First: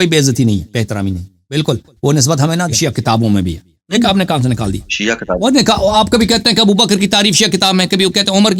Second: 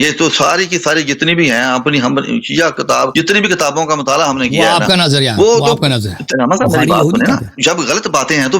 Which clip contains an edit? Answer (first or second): second